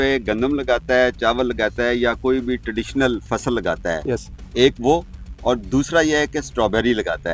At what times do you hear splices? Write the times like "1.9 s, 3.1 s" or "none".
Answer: 4.0 s